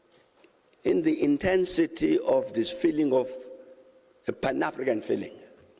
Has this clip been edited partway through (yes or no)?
no